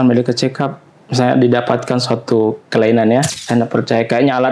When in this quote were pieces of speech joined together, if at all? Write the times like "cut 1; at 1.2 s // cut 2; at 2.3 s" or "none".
cut 1; at 3.3 s